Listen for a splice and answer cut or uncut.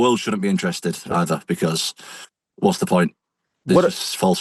uncut